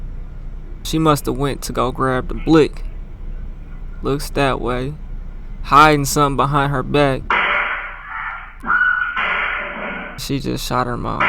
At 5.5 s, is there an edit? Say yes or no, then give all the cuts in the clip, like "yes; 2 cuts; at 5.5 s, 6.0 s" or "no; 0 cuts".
no; 4 cuts; at 0.9 s, 7.2 s, 8.5 s, 10.2 s